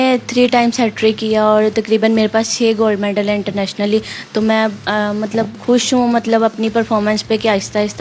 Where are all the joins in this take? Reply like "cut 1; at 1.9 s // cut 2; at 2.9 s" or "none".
none